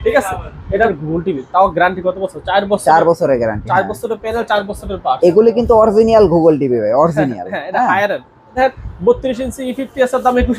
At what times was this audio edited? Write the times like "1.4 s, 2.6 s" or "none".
0.9 s, 8.6 s